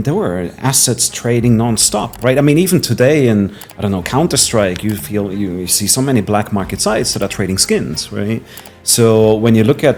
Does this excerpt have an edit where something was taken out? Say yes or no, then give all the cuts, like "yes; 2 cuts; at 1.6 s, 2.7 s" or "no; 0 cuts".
no; 0 cuts